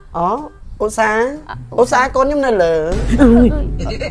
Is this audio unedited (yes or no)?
yes